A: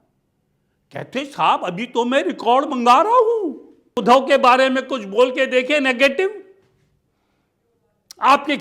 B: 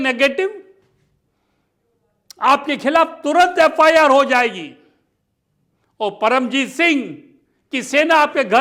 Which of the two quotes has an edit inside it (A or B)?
A